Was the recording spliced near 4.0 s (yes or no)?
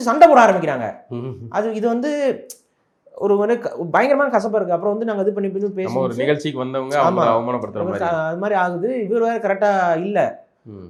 no